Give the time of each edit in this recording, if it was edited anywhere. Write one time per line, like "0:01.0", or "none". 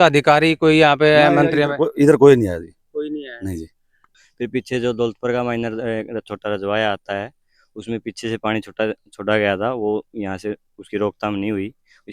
0:04.1

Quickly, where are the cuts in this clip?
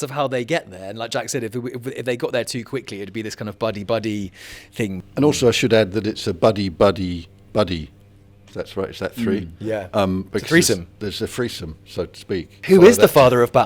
0:05.0

